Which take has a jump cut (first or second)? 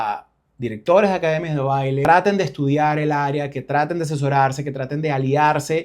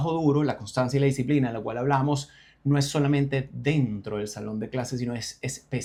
first